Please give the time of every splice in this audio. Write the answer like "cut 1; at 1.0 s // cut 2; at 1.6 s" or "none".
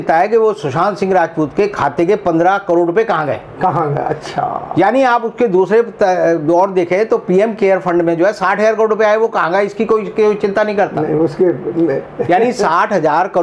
none